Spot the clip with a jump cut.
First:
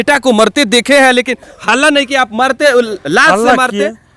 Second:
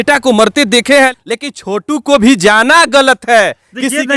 second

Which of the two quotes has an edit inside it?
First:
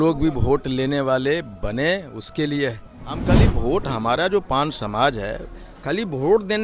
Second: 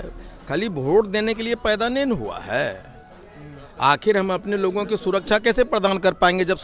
first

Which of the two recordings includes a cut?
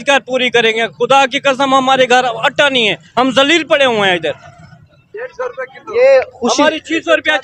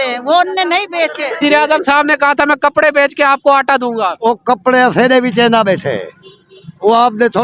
second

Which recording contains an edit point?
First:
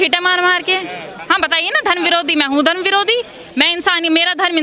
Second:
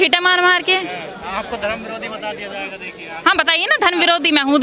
first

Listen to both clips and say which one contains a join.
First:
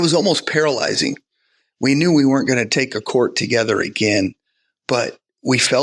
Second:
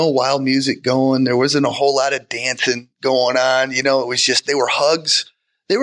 first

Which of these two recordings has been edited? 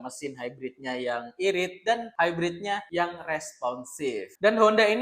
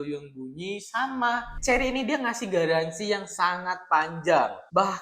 second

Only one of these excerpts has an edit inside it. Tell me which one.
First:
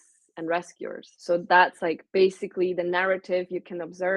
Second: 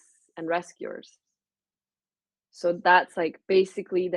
first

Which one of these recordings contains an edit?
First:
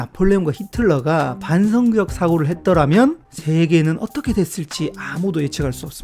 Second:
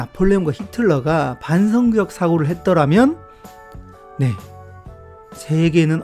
first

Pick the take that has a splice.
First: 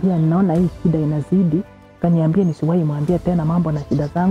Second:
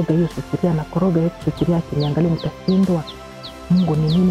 first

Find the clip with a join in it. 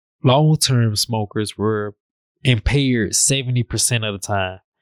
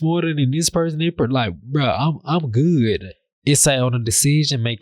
second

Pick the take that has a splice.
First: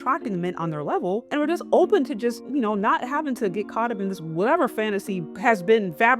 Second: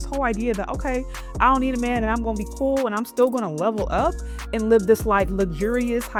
first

